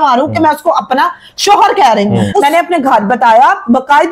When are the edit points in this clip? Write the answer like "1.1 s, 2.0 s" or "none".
2.4 s